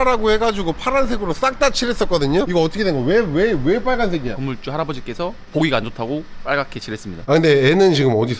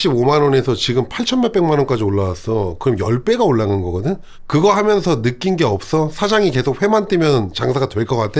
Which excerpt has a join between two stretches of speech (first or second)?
first